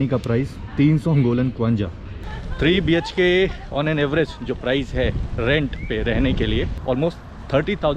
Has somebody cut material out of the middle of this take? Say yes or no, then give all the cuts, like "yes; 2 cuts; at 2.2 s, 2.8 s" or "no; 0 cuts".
yes; 2 cuts; at 2.0 s, 6.8 s